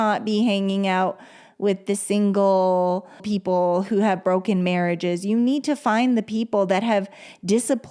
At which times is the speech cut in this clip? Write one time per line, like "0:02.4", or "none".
0:03.2